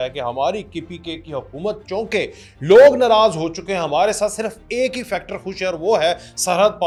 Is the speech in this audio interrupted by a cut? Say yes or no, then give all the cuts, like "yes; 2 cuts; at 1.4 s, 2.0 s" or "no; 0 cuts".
no; 0 cuts